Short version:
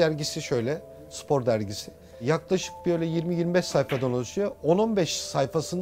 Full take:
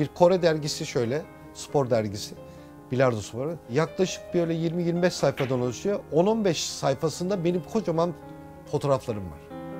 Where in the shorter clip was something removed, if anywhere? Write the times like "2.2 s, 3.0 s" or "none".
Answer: 2.1 s

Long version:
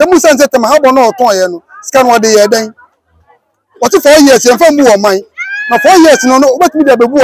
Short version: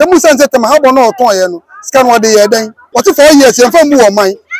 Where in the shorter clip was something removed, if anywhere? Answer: 2.8 s

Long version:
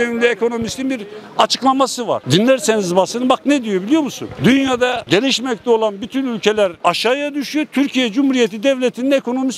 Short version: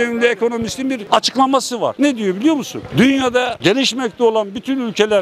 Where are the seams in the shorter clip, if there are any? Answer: 1.0 s, 1.9 s

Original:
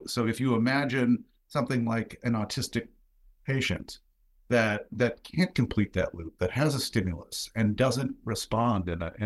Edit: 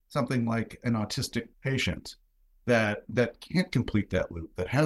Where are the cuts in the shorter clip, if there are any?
1.5 s

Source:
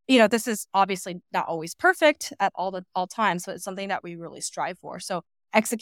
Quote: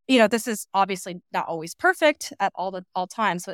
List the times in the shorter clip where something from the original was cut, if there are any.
none

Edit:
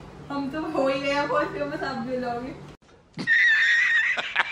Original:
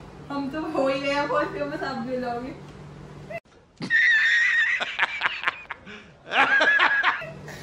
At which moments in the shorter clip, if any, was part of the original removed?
2.8 s

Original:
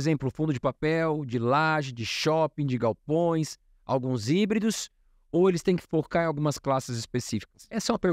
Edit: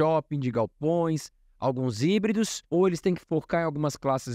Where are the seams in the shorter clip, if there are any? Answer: 2.6 s

